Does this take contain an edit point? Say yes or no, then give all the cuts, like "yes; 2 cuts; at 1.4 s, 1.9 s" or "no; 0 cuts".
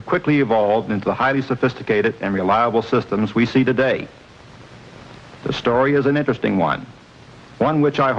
no; 0 cuts